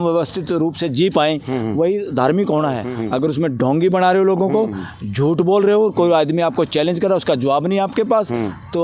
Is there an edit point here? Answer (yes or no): yes